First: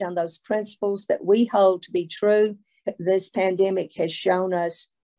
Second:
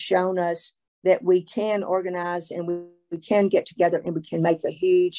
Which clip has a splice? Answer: first; 1 cut; at 2.8 s

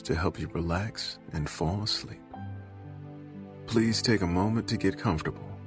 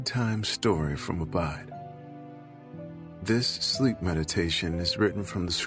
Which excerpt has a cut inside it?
second; 2 cuts; at 1.6 s, 3.2 s

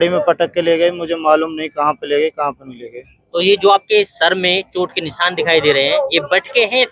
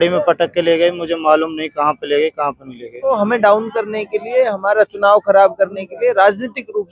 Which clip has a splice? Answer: second; 1 cut; at 3.1 s

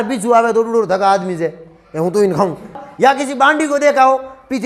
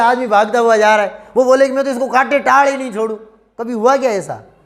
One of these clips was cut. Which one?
first; 1 cut; at 2.9 s

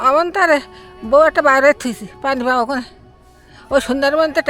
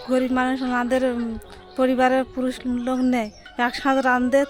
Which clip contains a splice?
second; 1 cut; at 3.4 s

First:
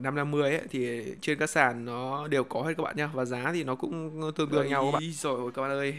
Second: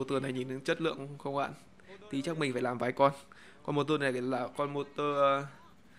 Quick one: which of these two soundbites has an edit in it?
first; 1 cut; at 5.0 s

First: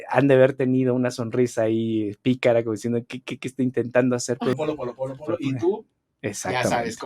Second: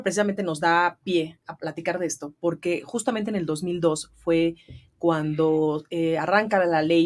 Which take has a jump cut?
first; 1 cut; at 4.5 s

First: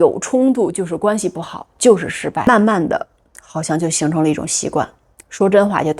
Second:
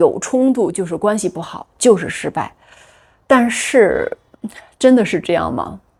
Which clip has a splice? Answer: first; 1 cut; at 2.5 s

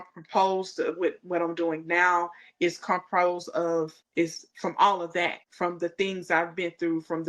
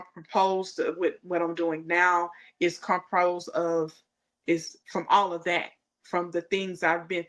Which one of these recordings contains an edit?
first; 2 cuts; at 4.0 s, 5.4 s

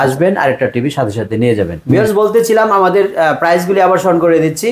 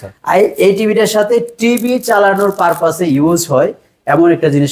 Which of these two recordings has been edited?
first; 1 cut; at 1.8 s

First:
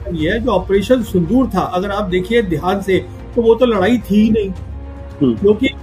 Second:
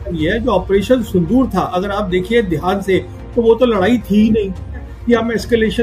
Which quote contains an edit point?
second; 1 cut; at 4.9 s

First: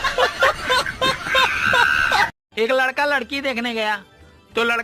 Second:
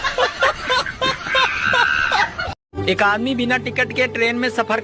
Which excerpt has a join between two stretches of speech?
second; 1 cut; at 2.3 s

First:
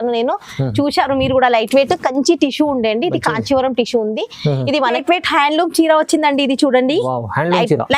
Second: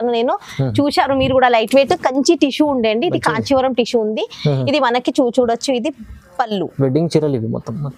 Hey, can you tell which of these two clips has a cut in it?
first; 1 cut; at 5.0 s

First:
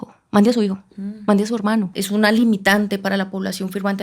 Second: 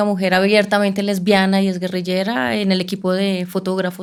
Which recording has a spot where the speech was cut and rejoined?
first; 1 cut; at 2.0 s

